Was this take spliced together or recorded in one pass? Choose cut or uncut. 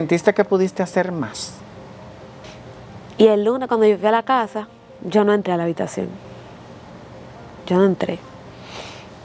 cut